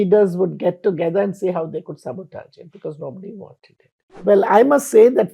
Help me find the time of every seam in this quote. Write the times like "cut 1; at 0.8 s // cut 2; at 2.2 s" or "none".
cut 1; at 4.0 s